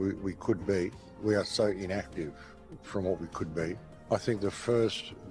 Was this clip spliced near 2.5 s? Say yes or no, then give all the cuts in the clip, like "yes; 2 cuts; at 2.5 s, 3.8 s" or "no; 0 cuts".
no; 1 cut; at 3.9 s